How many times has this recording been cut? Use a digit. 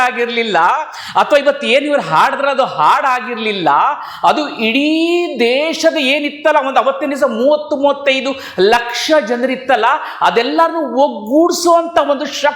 0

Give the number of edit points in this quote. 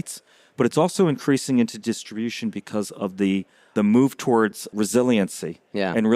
2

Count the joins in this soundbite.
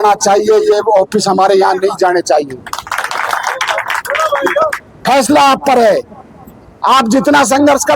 1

